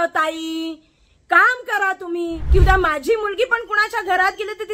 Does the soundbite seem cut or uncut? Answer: cut